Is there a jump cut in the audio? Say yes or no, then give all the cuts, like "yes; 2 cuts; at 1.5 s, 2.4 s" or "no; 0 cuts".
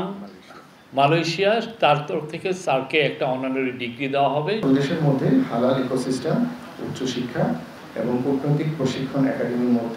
yes; 1 cut; at 4.6 s